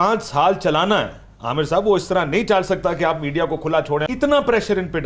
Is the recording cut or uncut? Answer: cut